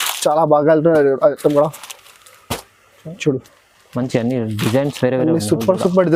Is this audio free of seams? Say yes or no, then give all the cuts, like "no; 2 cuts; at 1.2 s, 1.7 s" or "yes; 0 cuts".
yes; 0 cuts